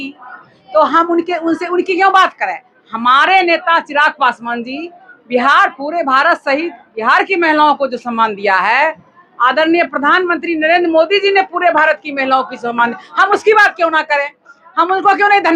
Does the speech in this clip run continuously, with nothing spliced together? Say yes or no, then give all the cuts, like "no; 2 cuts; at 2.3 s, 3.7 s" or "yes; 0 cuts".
yes; 0 cuts